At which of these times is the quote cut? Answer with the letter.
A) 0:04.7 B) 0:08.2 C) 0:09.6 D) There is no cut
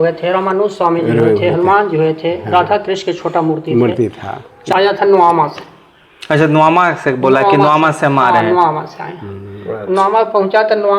A